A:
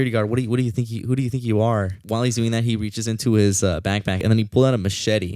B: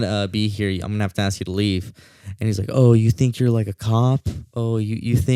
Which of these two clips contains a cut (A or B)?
A